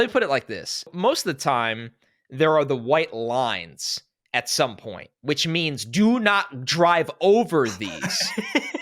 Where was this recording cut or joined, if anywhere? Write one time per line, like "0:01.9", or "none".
0:00.9